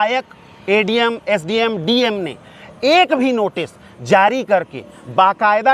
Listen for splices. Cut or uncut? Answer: uncut